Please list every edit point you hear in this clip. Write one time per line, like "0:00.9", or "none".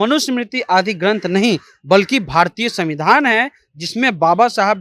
none